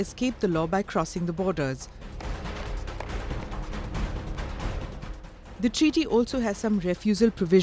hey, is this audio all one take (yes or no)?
no